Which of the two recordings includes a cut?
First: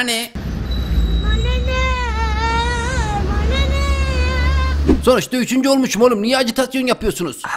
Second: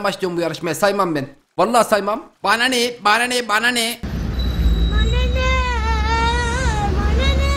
first; 1 cut; at 5.0 s

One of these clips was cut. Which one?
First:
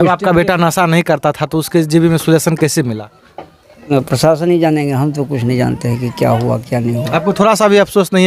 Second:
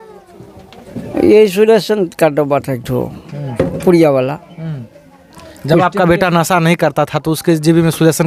first; 1 cut; at 3.8 s

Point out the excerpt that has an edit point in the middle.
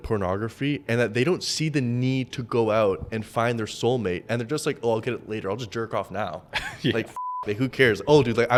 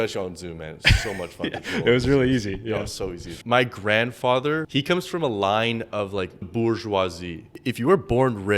second; 4 cuts; at 3.3 s, 4.7 s, 6.5 s, 7.5 s

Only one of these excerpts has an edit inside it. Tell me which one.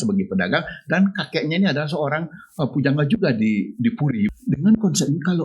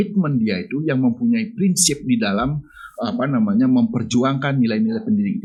first; 1 cut; at 4.3 s

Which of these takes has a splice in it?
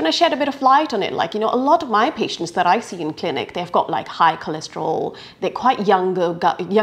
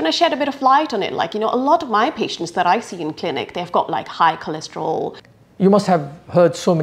second; 1 cut; at 5.2 s

